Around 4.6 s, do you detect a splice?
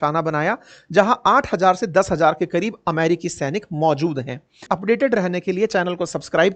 yes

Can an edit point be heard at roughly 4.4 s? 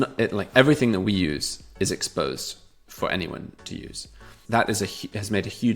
yes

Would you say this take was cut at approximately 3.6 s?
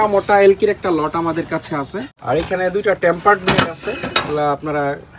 no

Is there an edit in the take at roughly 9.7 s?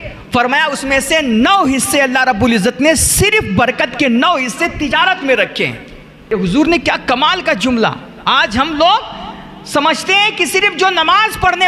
no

